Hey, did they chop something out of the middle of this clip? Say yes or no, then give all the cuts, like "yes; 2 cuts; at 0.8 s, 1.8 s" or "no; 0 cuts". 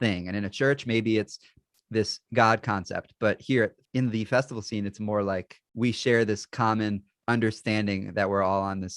yes; 2 cuts; at 5.6 s, 7.1 s